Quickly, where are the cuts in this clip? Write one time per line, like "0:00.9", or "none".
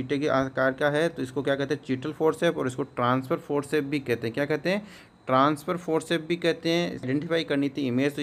0:07.1